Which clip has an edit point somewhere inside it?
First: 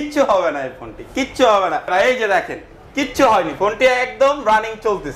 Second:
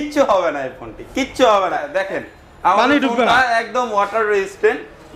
second; 1 cut; at 1.8 s

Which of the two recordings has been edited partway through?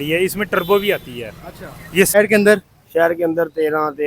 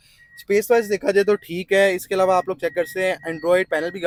first; 1 cut; at 2.1 s

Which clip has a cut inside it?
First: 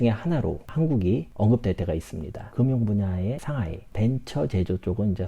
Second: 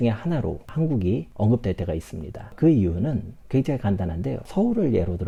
first; 1 cut; at 2.4 s

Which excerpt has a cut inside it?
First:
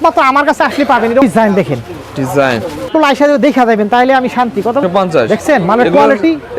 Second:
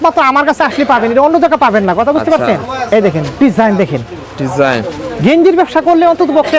first; 3 cuts; at 1.2 s, 2.9 s, 4.8 s

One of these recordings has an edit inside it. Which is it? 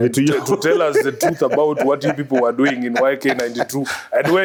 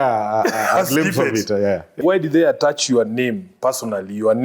second; 1 cut; at 2.0 s

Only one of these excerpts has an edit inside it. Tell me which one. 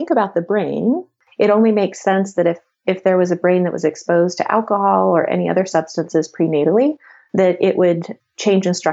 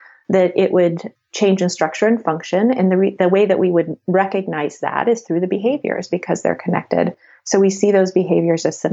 first; 1 cut; at 1.2 s

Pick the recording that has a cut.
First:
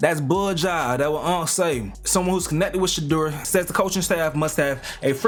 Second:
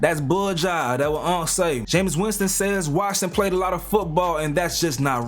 second; 1 cut; at 1.8 s

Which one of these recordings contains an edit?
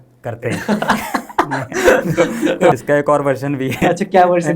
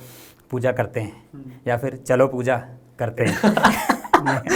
first; 1 cut; at 2.7 s

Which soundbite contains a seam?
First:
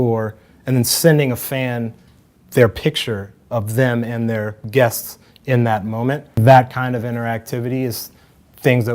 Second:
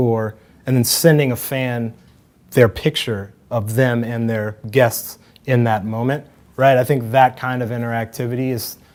first; 1 cut; at 6.4 s

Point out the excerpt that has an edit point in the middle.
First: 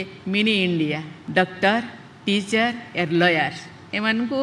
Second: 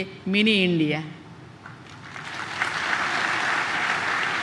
first; 1 cut; at 1.1 s

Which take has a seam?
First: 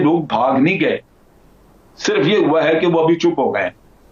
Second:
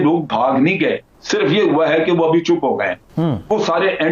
second; 2 cuts; at 1.1 s, 3.0 s

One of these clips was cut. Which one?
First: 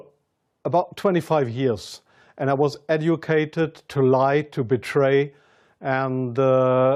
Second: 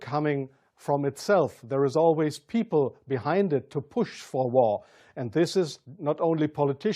second; 1 cut; at 4.2 s

